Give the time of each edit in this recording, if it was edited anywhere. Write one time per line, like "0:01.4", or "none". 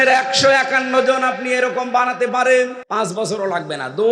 0:02.8